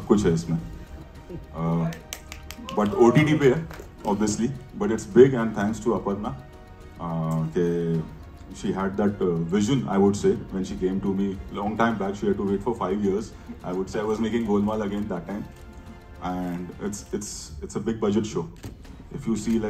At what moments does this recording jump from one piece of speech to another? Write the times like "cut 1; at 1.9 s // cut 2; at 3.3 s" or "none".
none